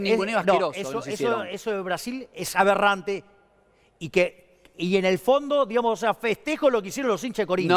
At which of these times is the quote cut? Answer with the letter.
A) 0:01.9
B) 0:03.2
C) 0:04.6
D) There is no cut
D